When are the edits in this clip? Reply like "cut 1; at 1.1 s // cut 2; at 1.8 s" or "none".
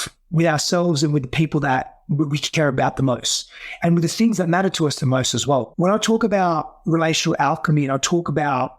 cut 1; at 5.7 s